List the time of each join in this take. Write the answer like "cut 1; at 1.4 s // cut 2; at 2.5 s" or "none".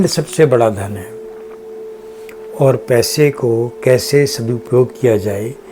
none

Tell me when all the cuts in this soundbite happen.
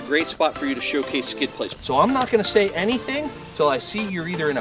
cut 1; at 1.7 s

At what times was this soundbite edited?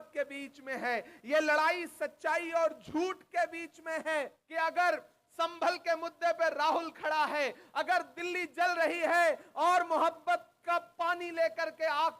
cut 1; at 4.4 s

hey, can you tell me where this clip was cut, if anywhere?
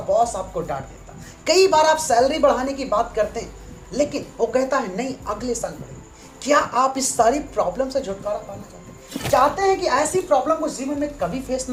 none

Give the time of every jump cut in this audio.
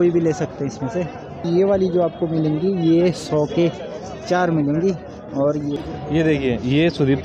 cut 1; at 1.4 s // cut 2; at 5.8 s

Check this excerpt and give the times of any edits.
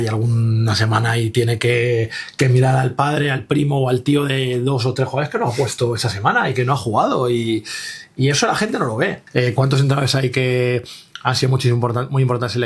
cut 1; at 9.2 s

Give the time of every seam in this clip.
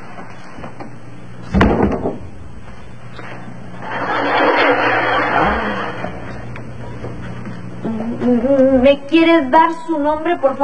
cut 1; at 3.9 s

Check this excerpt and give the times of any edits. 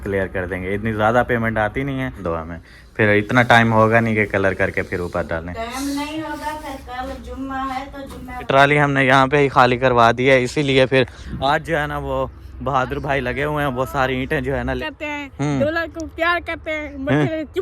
cut 1; at 2.2 s // cut 2; at 8.5 s // cut 3; at 14.8 s

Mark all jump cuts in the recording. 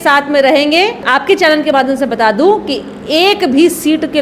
cut 1; at 1.0 s

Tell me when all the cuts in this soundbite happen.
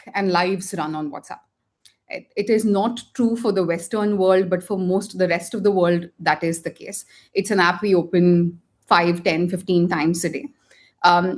none

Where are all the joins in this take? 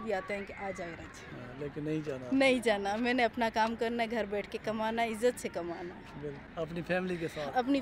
none

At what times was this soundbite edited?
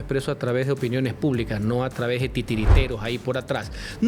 none

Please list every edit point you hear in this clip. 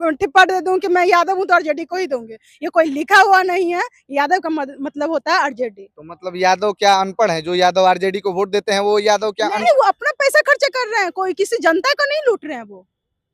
cut 1; at 9.6 s

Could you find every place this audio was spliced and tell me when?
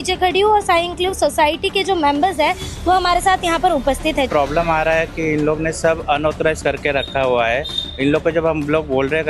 cut 1; at 4.3 s

